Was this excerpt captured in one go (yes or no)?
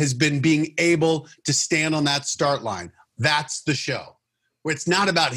no